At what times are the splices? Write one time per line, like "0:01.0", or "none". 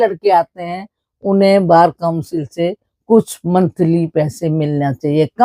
none